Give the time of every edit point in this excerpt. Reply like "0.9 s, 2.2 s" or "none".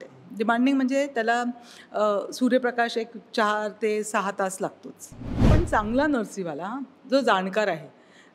5.4 s